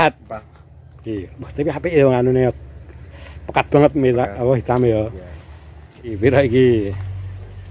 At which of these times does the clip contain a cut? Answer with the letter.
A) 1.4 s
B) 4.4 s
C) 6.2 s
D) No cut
C